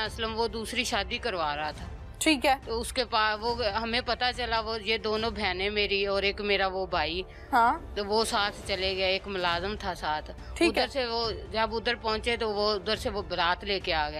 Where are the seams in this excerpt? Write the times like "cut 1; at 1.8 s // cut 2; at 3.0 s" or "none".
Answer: none